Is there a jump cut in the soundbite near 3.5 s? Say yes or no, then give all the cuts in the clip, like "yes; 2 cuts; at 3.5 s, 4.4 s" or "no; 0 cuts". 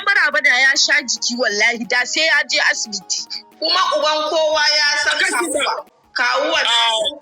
yes; 1 cut; at 3.5 s